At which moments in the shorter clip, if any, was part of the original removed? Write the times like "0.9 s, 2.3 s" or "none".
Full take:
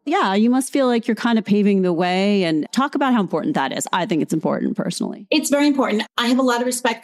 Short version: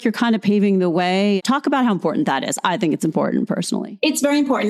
1.4 s